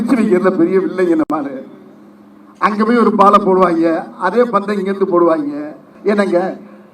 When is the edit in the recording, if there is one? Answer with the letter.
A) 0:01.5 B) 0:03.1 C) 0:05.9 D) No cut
C